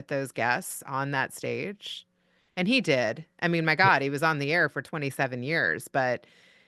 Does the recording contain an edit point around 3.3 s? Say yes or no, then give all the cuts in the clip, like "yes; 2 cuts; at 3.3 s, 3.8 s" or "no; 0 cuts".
no; 0 cuts